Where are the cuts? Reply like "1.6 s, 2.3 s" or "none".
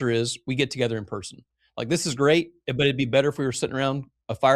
none

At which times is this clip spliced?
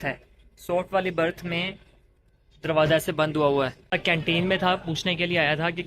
3.9 s

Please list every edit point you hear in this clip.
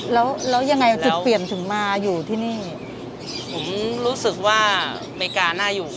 none

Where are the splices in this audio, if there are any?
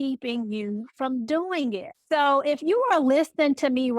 1.9 s

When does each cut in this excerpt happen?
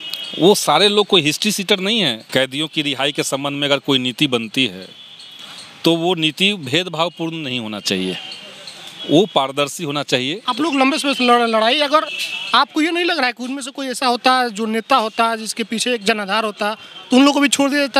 2.2 s, 10.4 s

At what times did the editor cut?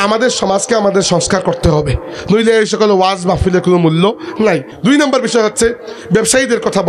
4.7 s

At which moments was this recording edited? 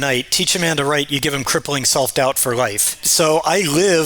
3.0 s

